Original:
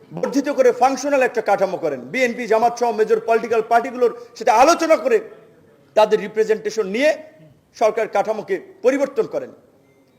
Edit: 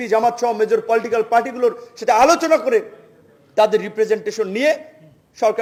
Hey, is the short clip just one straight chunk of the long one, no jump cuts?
yes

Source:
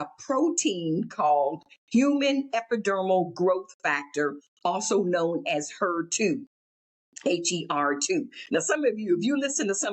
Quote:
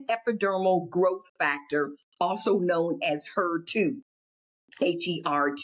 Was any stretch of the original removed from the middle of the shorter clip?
no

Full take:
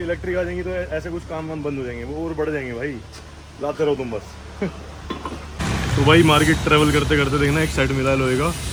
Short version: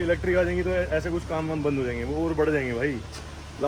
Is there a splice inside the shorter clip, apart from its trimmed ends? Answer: no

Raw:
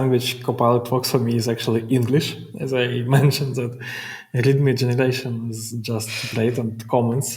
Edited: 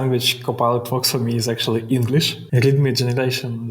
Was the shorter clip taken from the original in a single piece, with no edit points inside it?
no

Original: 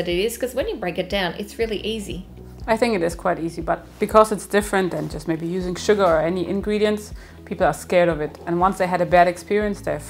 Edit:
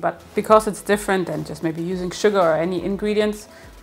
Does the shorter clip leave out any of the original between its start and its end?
no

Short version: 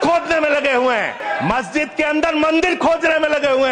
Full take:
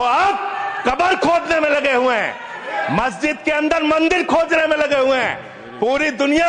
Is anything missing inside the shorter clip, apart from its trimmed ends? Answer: yes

